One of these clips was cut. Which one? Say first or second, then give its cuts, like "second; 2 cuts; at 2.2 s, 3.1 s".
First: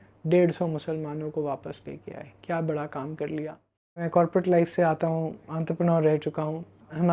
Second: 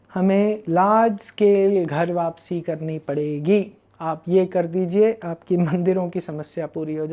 first; 1 cut; at 4.0 s